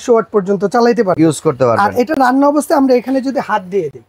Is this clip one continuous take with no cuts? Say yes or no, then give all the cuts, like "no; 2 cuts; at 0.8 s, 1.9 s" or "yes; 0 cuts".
yes; 0 cuts